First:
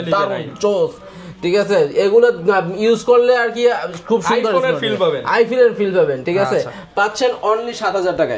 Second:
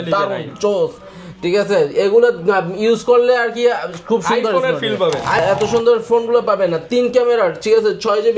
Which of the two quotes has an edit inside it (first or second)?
second